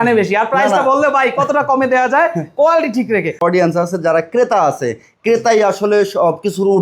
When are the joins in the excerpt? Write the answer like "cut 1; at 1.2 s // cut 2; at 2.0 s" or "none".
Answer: cut 1; at 3.4 s